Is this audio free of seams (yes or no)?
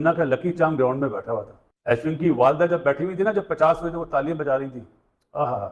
yes